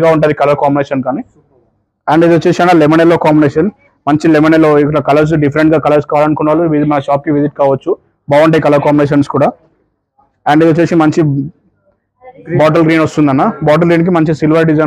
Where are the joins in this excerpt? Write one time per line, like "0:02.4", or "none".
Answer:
none